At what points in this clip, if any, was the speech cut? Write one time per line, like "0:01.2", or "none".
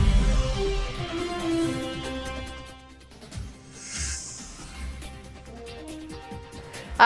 0:03.7
0:05.1